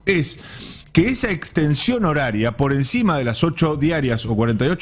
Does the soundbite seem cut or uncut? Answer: uncut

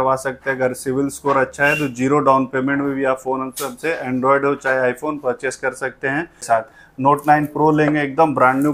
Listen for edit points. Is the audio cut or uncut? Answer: cut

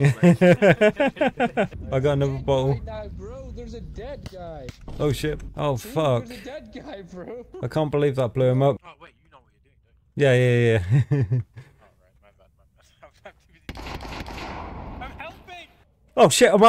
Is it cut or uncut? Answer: cut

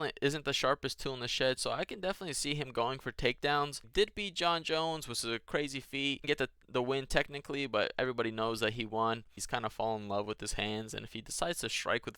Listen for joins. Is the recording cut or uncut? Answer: cut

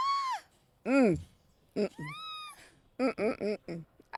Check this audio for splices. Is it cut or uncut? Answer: uncut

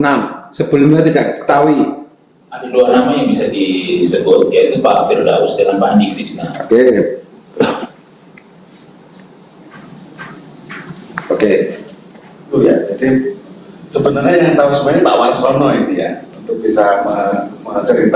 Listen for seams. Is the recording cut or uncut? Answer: cut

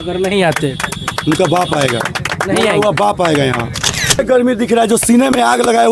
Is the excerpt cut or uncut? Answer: cut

